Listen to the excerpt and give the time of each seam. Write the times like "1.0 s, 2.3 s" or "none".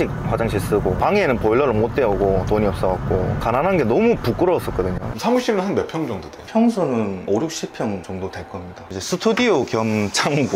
3.4 s, 5.1 s, 8.8 s